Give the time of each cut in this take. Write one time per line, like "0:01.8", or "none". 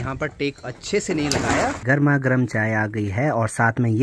0:01.8